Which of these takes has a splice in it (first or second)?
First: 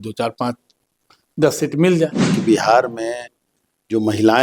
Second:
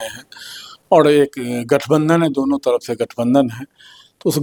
first